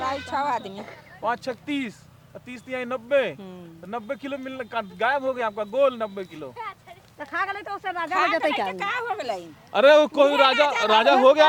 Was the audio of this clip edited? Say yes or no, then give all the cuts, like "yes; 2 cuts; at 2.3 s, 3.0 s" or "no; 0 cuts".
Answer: no; 0 cuts